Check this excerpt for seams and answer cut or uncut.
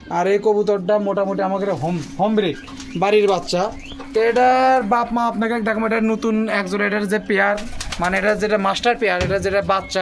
uncut